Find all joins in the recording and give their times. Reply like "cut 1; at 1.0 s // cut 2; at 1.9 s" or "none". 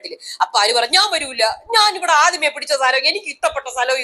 none

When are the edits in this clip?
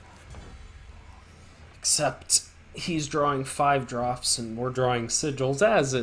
none

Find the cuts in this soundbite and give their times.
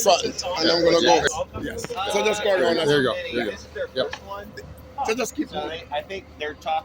cut 1; at 1.3 s

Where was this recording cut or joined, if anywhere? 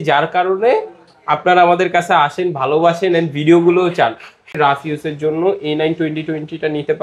cut 1; at 4.5 s

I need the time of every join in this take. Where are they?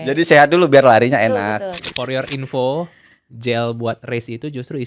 cut 1; at 1.9 s

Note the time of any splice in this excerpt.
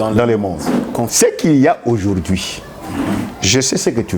cut 1; at 1.1 s

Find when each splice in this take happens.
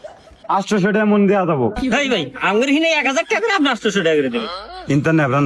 cut 1; at 4.5 s

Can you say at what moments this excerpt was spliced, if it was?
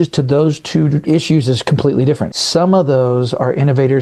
cut 1; at 1.0 s // cut 2; at 2.3 s

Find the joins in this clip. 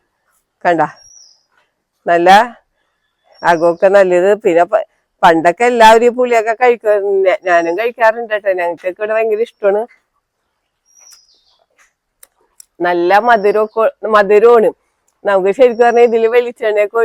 none

